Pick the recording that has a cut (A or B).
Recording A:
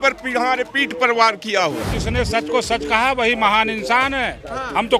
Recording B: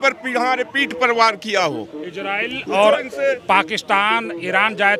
A